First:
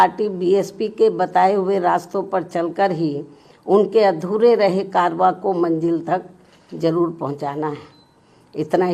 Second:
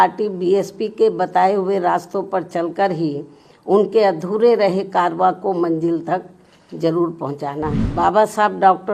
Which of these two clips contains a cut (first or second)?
second